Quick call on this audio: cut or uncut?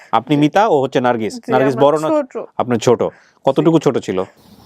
uncut